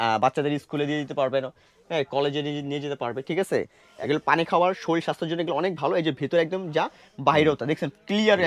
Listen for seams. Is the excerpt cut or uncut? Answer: cut